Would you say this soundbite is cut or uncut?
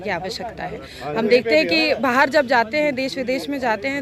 uncut